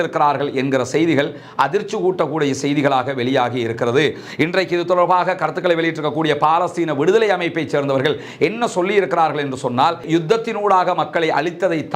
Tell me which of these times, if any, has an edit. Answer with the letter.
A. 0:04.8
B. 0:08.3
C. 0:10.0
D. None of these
C